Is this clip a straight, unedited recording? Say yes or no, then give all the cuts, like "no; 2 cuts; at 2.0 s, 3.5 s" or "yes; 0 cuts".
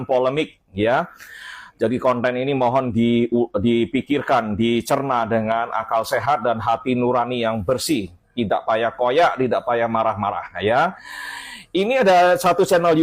yes; 0 cuts